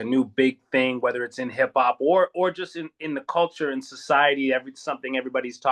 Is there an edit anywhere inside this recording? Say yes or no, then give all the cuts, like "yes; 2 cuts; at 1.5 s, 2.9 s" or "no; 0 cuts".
no; 0 cuts